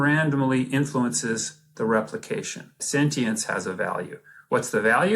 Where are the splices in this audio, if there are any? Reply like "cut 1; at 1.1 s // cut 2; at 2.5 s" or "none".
cut 1; at 2.8 s